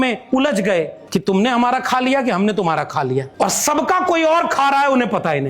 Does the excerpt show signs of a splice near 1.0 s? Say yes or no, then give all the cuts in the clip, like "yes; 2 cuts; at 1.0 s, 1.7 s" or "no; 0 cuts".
yes; 2 cuts; at 1.0 s, 3.3 s